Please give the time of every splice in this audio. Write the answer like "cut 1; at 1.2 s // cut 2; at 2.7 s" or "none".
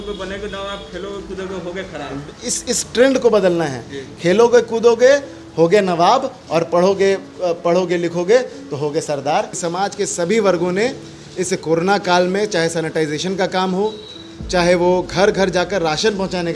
cut 1; at 9.6 s